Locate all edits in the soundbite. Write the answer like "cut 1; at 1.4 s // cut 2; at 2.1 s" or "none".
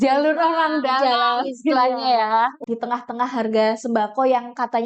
cut 1; at 2.6 s